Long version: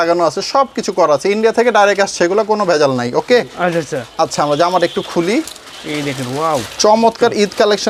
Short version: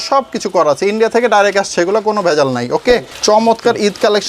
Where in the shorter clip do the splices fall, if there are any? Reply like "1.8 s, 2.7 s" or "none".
3.1 s